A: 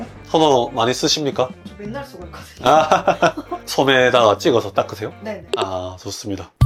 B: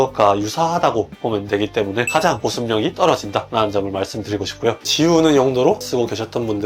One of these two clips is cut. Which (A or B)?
B